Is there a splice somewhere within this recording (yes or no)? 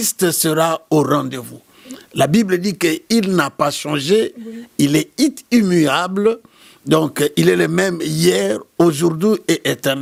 no